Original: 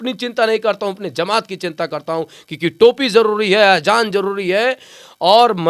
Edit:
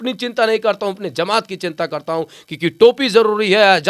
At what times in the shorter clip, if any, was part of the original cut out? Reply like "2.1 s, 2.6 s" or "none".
none

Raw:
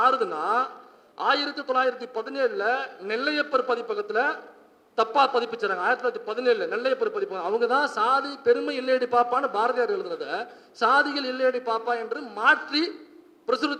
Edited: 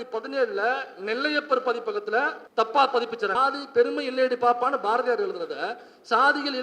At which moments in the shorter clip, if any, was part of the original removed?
2.4 s, 3.3 s

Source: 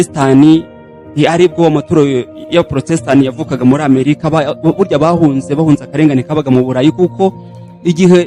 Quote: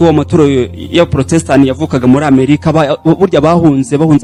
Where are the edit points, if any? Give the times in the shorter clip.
none

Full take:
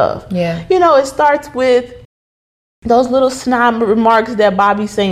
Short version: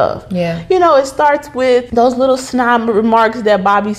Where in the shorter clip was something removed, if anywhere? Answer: 1.9 s

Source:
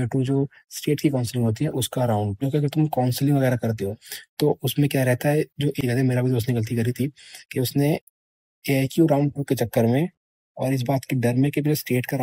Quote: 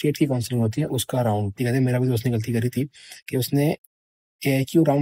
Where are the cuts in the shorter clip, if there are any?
1.5 s

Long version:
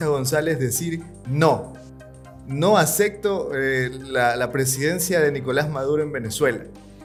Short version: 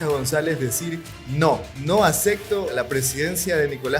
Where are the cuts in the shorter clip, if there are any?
1.7 s, 2.7 s

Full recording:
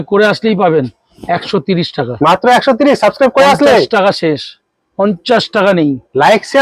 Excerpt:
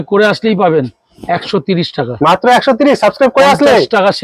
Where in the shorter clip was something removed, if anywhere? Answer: none

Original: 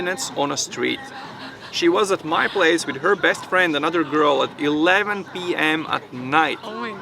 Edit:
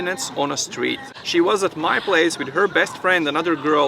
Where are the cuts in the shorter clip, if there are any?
1.1 s

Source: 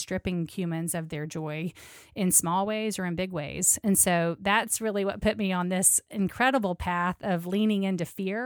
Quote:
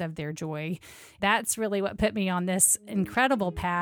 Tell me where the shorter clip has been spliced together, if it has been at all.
1.1 s

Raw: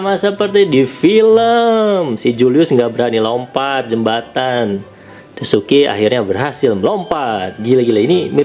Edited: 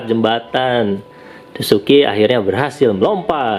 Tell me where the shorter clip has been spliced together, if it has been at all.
none

